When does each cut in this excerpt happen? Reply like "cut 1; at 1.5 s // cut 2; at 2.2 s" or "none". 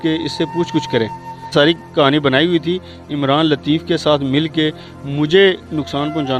cut 1; at 1.5 s